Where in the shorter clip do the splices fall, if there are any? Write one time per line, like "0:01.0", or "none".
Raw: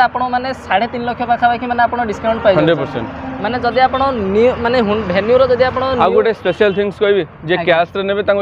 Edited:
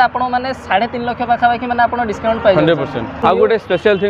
0:03.2